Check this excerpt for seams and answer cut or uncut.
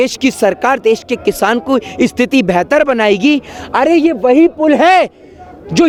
uncut